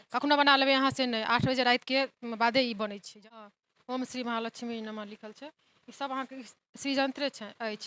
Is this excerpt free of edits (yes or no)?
no